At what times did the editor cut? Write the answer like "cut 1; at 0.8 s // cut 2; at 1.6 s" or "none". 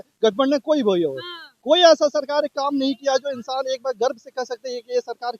none